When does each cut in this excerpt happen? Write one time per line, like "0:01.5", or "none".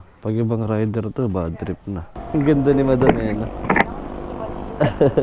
0:02.1